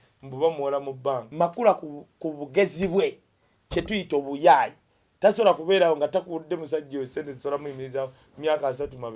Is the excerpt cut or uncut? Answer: cut